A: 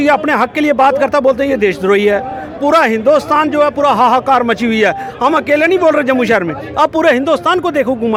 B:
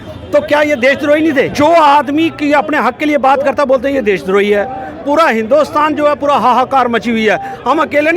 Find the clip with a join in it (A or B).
B